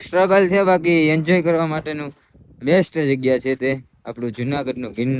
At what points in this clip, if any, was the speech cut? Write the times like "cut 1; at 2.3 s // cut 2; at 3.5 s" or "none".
none